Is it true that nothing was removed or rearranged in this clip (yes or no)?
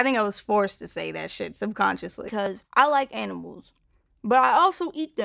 no